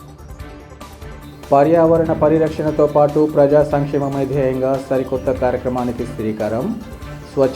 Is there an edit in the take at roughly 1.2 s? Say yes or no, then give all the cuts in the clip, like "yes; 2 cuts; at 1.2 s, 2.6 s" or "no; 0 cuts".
yes; 1 cut; at 1.2 s